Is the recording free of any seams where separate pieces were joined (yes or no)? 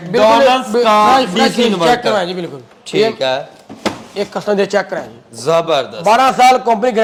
yes